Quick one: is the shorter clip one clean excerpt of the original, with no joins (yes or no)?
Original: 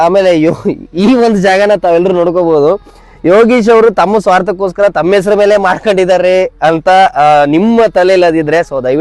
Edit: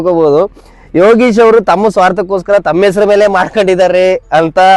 yes